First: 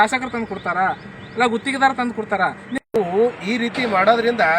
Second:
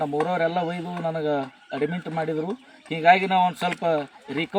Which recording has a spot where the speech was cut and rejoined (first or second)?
first